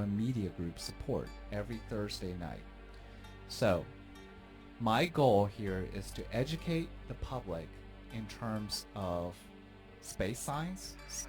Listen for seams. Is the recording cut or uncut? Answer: uncut